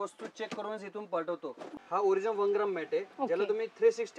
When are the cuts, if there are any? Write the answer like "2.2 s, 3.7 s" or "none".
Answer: 1.8 s

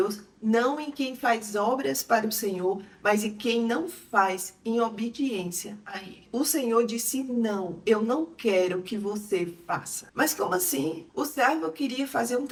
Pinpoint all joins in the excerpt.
none

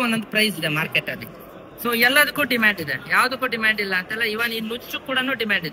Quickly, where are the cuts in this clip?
none

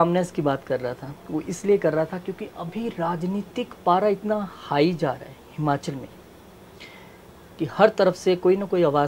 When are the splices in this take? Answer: none

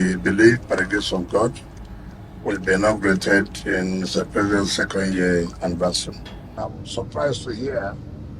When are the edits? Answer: 6.4 s

